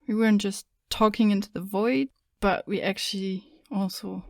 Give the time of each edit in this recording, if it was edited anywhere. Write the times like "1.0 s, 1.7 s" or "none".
2.3 s